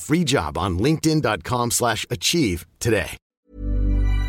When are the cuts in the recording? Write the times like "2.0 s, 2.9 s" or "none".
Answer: 3.2 s